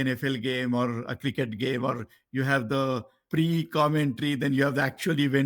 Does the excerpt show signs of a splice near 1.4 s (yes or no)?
no